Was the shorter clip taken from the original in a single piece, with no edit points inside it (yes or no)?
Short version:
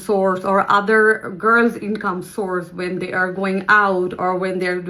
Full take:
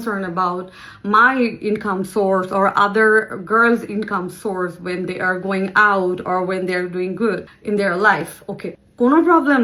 yes